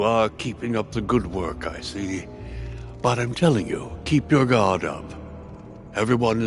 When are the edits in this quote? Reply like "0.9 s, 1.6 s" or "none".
none